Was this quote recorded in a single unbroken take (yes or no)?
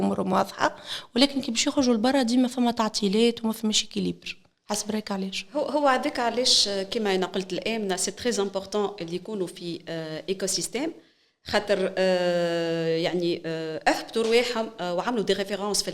yes